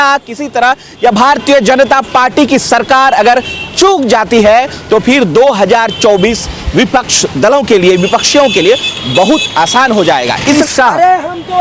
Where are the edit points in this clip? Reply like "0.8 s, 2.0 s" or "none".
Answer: 10.6 s